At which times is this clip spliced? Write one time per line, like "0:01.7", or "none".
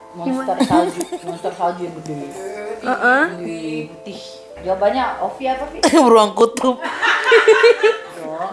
0:04.5